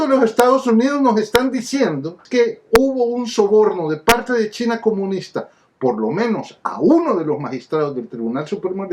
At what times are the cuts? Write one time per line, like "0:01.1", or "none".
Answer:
0:02.2